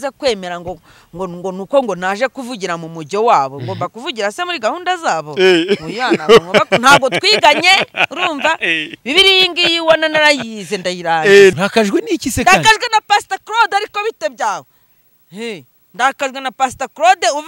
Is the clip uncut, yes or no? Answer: no